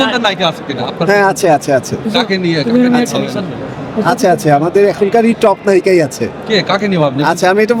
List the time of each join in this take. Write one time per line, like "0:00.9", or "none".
none